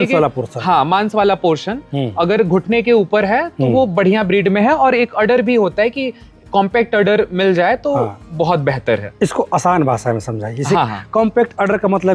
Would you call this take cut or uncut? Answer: uncut